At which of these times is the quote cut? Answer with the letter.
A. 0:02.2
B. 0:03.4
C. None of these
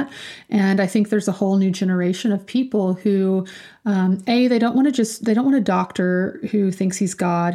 C